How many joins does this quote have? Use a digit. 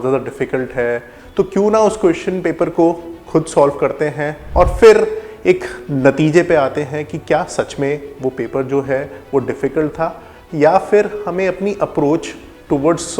2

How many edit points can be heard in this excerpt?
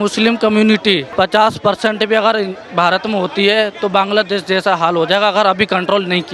1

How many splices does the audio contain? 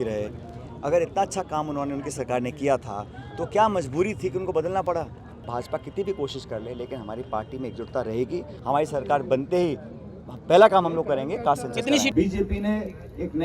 3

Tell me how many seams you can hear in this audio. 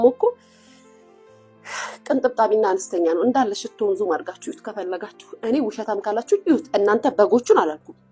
0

